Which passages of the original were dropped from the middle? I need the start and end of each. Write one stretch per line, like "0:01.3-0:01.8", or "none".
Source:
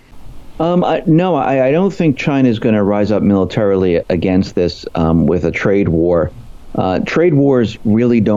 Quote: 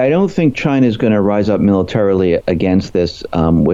none